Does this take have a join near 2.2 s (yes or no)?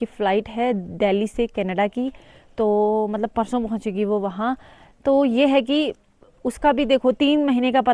no